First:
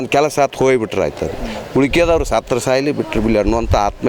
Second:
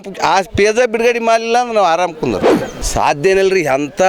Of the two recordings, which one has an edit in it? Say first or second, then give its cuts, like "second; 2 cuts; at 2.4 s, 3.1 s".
second; 1 cut; at 2.7 s